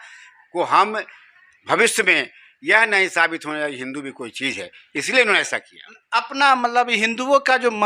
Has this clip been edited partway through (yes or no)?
no